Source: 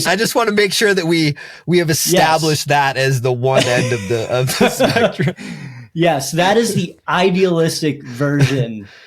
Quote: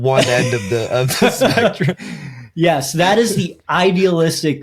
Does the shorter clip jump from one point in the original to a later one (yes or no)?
no